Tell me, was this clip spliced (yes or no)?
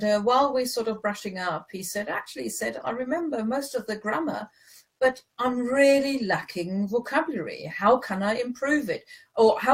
no